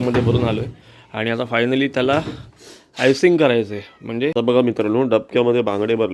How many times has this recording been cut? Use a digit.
1